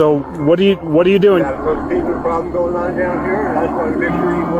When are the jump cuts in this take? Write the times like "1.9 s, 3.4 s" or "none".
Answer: 1.4 s